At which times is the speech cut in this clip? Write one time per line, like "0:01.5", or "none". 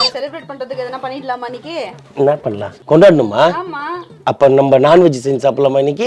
0:02.7

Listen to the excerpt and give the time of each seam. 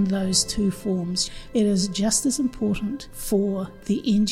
0:01.2
0:03.1

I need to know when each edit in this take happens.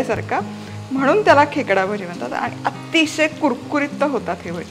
none

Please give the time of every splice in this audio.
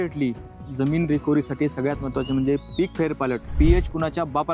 0:03.5

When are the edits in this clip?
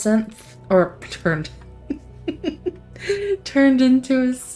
none

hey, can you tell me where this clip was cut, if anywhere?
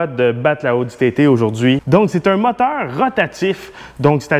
0:01.8

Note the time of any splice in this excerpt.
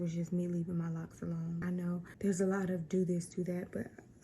0:01.7

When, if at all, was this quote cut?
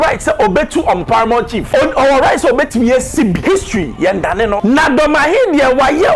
0:01.6
0:03.4
0:04.6

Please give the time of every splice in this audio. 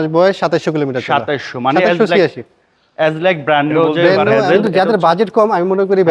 0:04.5

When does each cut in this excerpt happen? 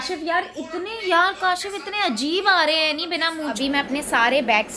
0:03.6

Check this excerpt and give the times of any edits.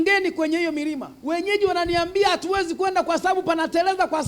0:01.1

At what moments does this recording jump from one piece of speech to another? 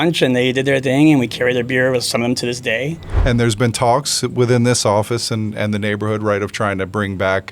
0:03.1

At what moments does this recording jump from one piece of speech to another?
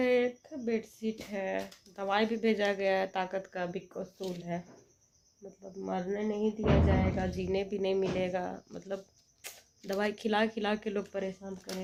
none

